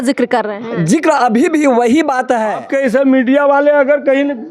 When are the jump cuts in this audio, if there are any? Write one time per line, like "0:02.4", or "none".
0:02.6